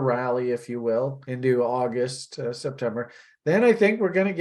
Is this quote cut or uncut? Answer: cut